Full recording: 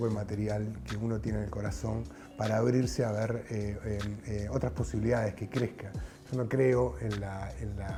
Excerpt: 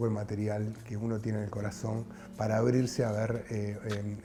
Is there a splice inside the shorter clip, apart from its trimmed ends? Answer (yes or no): no